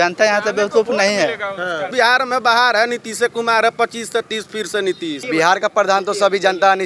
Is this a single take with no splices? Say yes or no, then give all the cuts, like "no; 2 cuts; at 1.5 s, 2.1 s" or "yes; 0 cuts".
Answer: no; 2 cuts; at 1.9 s, 5.2 s